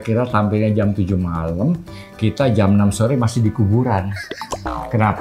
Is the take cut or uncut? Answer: uncut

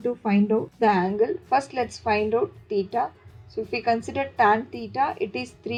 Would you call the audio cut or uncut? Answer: uncut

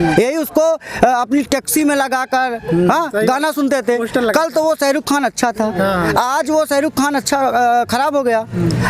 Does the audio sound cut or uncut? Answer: uncut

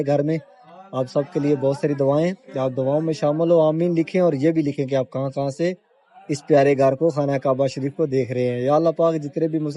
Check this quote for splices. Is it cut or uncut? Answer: uncut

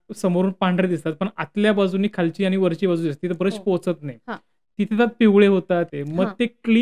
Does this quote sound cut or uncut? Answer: cut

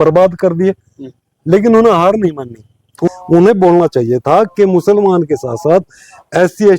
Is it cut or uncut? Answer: cut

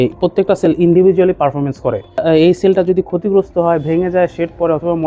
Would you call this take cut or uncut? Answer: cut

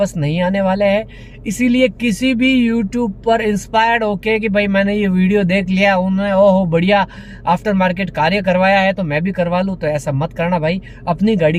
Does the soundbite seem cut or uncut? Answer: uncut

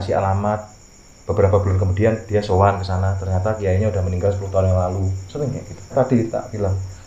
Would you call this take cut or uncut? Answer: cut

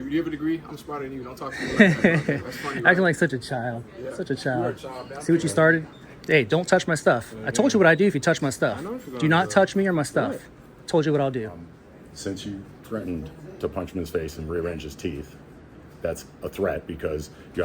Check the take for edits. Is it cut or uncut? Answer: cut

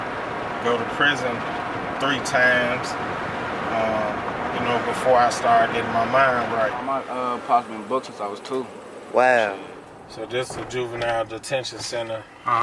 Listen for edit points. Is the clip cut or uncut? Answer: cut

